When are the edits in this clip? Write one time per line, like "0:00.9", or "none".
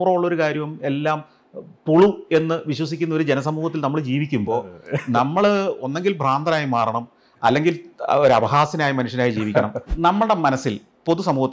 0:09.9